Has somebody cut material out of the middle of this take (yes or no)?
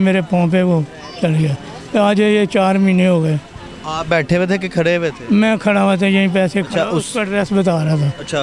no